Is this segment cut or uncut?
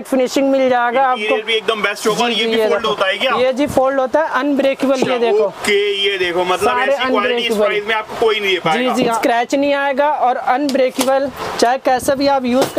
cut